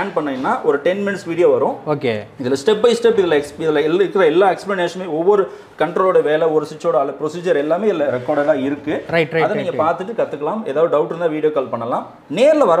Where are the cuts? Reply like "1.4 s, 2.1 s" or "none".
none